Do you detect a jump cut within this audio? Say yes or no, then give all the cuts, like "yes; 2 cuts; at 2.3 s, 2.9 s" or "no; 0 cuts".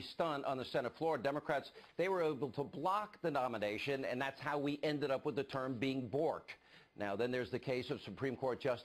yes; 1 cut; at 4.1 s